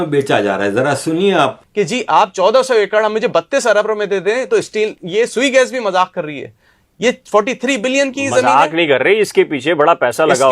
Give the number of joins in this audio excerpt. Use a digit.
1